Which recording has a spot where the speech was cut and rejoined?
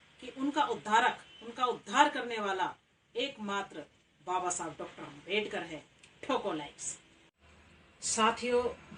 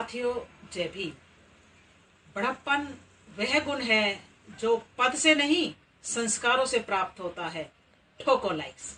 first; 1 cut; at 7.3 s

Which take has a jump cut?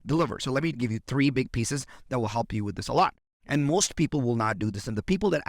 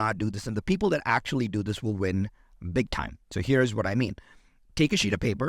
first; 1 cut; at 3.3 s

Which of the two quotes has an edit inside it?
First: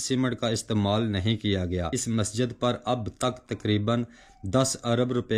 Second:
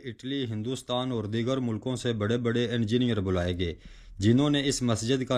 first; 1 cut; at 2.0 s

